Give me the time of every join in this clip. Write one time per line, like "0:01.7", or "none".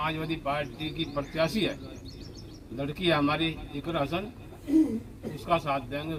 none